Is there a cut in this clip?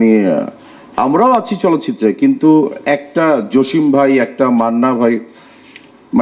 no; 0 cuts

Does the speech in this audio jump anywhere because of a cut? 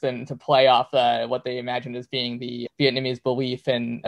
no; 0 cuts

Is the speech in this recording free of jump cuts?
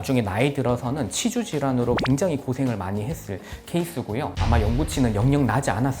no; 1 cut; at 4.4 s

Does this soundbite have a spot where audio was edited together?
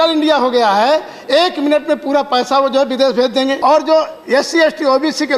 yes; 1 cut; at 3.6 s

